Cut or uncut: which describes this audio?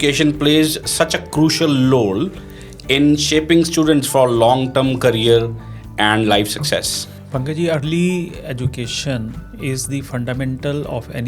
uncut